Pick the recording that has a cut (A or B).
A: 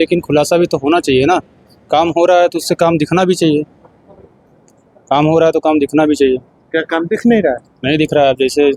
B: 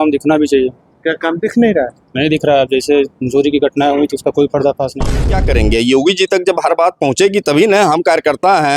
B